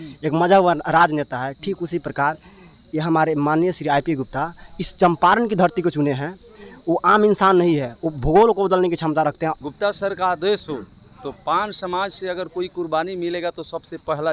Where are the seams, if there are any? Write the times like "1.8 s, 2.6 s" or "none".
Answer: 9.6 s